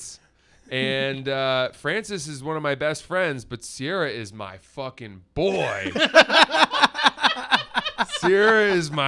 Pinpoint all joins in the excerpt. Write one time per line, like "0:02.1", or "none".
none